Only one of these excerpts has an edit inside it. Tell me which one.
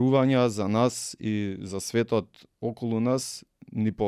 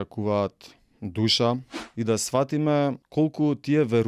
second; 2 cuts; at 1.8 s, 3.0 s

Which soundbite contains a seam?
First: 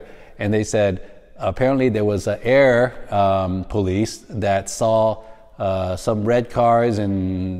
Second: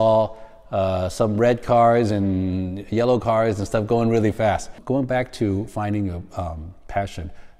second; 1 cut; at 4.7 s

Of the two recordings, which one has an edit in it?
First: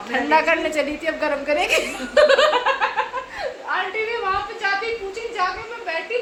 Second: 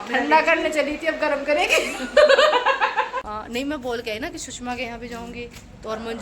second; 1 cut; at 3.2 s

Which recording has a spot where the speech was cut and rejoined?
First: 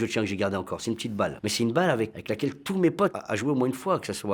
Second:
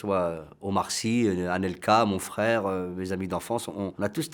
first; 1 cut; at 1.4 s

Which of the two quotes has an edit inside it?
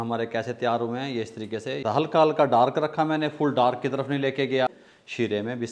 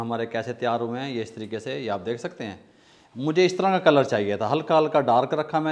first; 2 cuts; at 1.8 s, 4.7 s

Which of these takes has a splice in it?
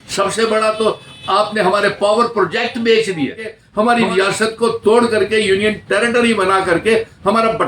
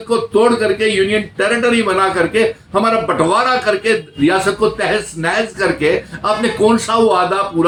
first; 1 cut; at 3.6 s

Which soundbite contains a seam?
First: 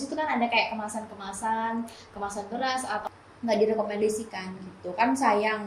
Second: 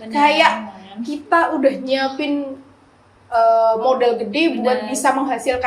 first; 1 cut; at 3.0 s

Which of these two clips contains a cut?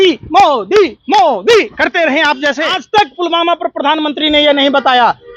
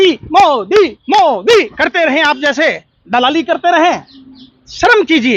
first; 1 cut; at 2.7 s

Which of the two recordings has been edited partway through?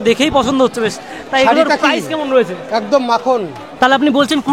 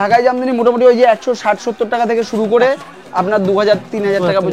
first; 1 cut; at 3.6 s

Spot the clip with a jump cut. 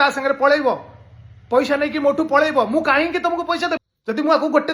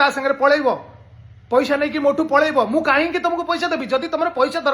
first; 1 cut; at 3.8 s

